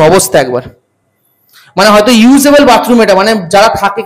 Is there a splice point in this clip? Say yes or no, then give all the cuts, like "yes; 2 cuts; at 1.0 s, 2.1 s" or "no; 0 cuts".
no; 0 cuts